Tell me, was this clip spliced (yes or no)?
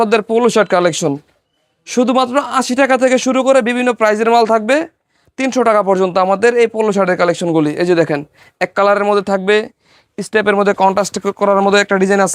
no